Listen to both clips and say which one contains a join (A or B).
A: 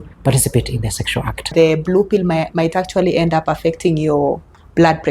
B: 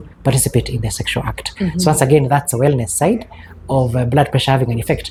A